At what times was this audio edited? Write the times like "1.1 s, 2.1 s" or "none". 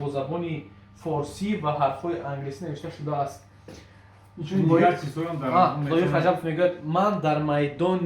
none